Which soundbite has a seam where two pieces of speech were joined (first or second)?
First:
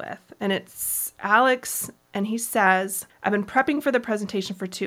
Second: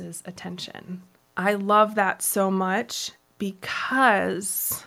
first